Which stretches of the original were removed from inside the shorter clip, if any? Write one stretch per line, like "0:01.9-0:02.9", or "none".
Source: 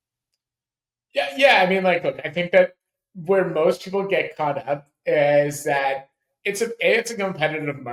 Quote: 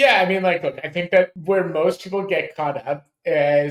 0:02.8-0:03.2